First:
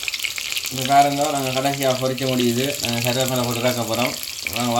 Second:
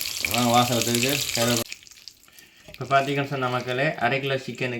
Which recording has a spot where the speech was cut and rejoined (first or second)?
second